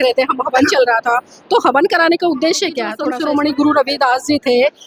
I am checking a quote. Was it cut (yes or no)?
yes